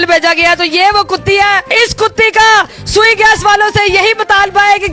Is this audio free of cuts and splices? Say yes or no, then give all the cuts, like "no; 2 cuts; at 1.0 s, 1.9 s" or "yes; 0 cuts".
yes; 0 cuts